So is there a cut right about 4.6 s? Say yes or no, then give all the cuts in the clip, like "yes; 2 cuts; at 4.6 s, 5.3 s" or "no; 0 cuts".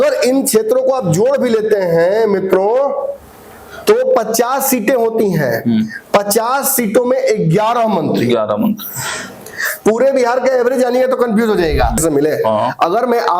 no; 1 cut; at 12.0 s